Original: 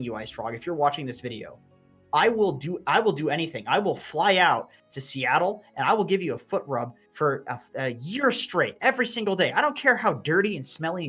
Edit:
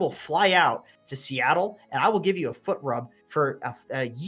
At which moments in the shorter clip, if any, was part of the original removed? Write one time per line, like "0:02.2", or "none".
none